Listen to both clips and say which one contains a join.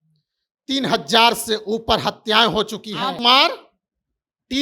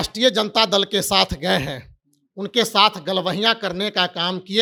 first; 1 cut; at 3.2 s

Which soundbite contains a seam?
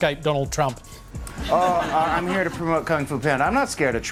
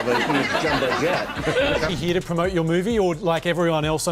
second; 1 cut; at 1.9 s

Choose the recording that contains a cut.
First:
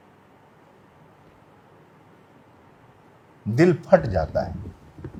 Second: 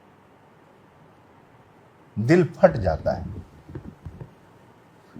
second; 1 cut; at 1.2 s

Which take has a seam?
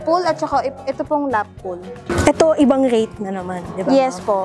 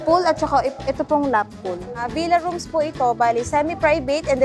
second; 1 cut; at 2.1 s

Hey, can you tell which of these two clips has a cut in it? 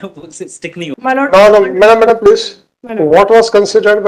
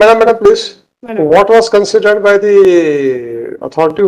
first; 1 cut; at 0.9 s

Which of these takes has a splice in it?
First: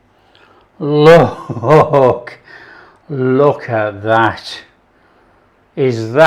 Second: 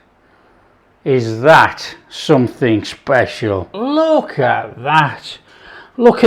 second; 1 cut; at 3.7 s

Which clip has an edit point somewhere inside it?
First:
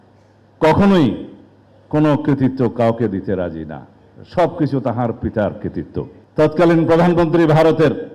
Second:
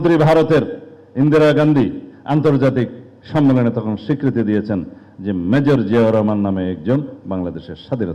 first; 1 cut; at 6.2 s

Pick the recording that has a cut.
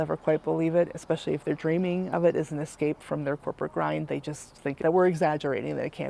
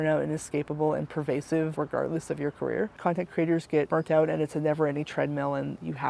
second; 2 cuts; at 3.0 s, 3.9 s

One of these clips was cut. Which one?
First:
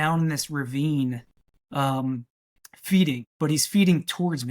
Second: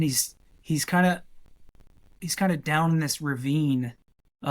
first; 1 cut; at 3.3 s

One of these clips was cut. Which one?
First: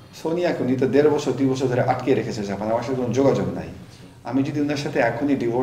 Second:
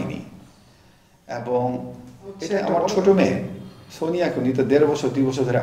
second; 1 cut; at 2.6 s

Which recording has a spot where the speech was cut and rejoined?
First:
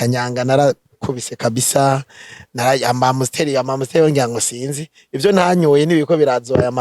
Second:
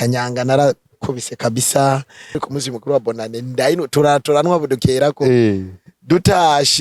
second; 1 cut; at 2.4 s

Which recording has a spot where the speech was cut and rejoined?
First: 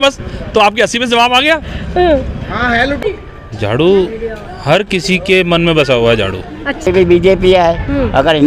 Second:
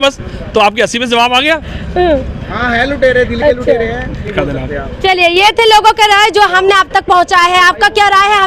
first; 2 cuts; at 3.0 s, 6.9 s

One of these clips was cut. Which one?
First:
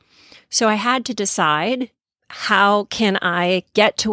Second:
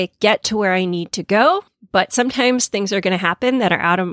second; 1 cut; at 1.7 s

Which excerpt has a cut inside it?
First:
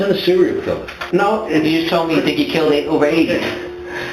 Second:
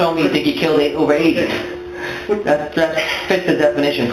first; 1 cut; at 1.0 s

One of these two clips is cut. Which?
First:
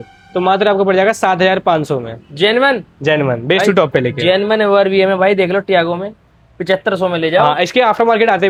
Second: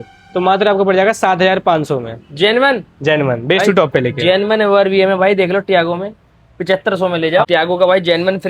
second; 1 cut; at 7.4 s

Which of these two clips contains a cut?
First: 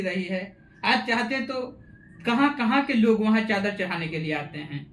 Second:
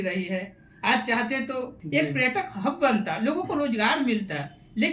second; 1 cut; at 1.8 s

